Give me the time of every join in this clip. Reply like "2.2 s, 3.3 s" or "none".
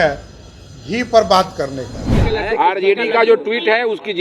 2.3 s